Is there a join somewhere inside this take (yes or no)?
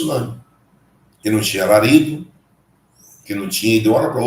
yes